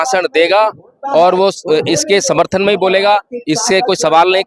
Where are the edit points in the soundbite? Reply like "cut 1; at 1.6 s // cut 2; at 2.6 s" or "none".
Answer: none